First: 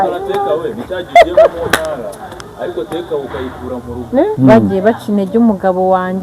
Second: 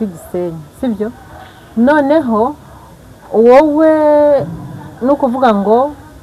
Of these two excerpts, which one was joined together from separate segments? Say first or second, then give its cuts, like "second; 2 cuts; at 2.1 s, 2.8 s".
first; 1 cut; at 4.3 s